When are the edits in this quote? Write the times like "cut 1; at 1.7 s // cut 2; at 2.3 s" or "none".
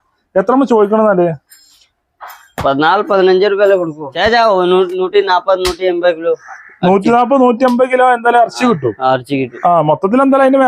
cut 1; at 4.0 s